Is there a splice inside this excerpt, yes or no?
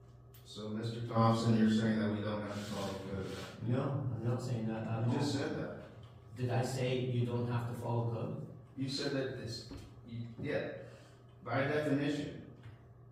no